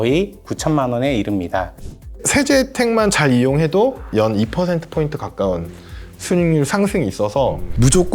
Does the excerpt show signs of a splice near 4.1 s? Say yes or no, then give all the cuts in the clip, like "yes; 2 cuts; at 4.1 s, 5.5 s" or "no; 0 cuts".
yes; 2 cuts; at 2.2 s, 4.1 s